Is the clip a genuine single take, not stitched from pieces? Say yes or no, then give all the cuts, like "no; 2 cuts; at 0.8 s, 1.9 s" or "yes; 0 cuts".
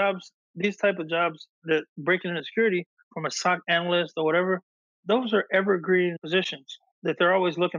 yes; 0 cuts